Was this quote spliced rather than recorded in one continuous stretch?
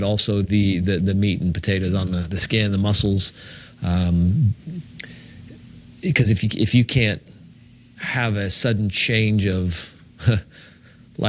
no; 0 cuts

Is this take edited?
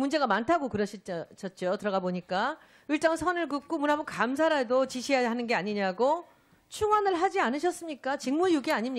no; 0 cuts

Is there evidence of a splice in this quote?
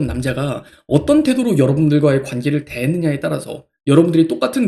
no; 0 cuts

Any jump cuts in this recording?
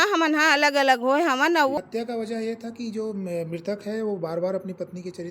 yes; 1 cut; at 1.8 s

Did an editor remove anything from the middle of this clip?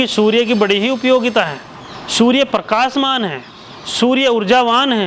no; 0 cuts

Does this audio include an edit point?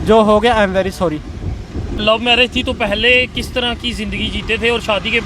yes; 1 cut; at 2.0 s

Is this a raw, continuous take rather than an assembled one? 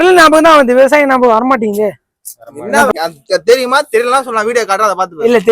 no; 1 cut; at 2.9 s

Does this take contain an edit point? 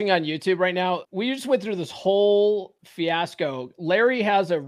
yes; 2 cuts; at 1.1 s, 2.8 s

